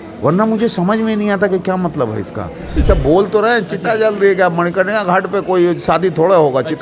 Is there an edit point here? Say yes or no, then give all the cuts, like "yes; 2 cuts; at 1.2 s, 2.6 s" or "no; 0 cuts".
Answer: yes; 1 cut; at 2.8 s